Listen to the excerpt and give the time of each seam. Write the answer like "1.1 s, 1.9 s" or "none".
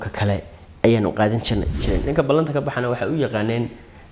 1.8 s